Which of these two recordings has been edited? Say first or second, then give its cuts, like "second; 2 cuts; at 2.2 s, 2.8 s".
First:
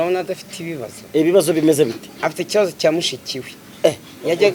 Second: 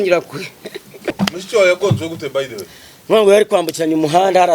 second; 1 cut; at 1.2 s